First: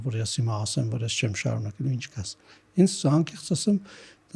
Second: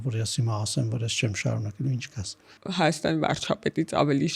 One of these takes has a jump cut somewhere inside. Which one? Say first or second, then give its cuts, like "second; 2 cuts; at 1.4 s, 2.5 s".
second; 1 cut; at 2.5 s